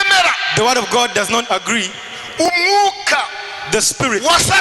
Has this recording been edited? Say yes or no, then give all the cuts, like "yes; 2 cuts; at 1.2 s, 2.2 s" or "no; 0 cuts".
no; 0 cuts